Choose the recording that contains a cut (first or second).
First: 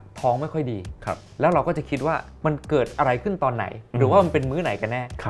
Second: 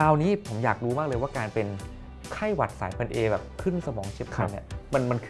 first